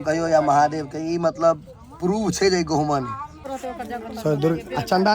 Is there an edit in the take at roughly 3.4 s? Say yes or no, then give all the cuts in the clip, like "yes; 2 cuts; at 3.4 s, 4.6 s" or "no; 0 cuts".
yes; 1 cut; at 3.4 s